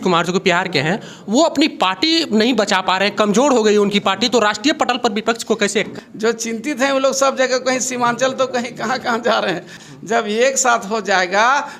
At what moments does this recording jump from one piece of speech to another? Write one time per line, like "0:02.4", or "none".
0:05.9
0:09.8

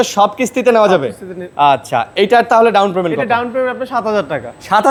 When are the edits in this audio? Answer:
none

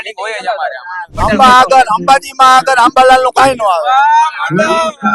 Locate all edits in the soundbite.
0:01.1

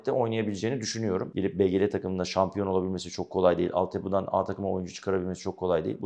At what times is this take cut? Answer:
0:01.3

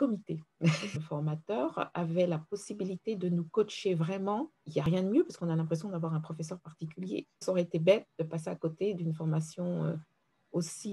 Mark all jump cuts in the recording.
0:01.0
0:04.8
0:07.4

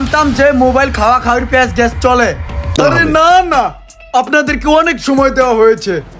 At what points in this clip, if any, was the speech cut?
0:02.7

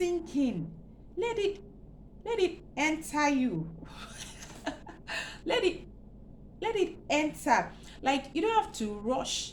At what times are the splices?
none

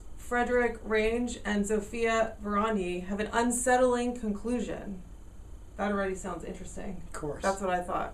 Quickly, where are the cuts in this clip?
0:03.3

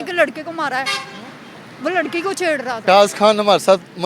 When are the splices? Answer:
0:02.8

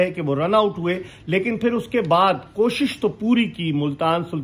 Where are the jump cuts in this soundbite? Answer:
none

